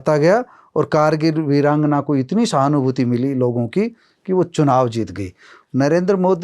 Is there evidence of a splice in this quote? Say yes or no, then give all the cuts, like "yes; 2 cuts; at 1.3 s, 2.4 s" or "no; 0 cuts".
yes; 1 cut; at 5.5 s